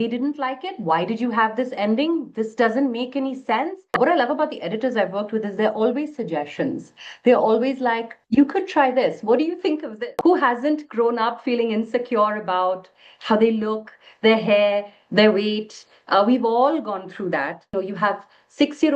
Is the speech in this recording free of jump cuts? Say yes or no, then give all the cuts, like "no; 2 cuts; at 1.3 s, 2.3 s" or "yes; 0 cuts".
no; 3 cuts; at 4.0 s, 9.9 s, 17.7 s